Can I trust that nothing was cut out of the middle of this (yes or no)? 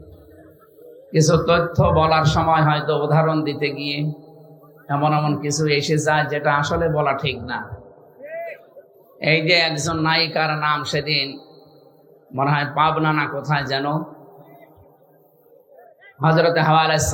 yes